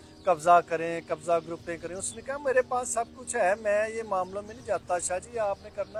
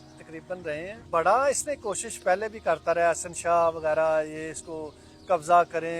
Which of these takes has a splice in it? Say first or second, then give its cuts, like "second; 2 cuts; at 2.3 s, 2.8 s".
second; 1 cut; at 1.0 s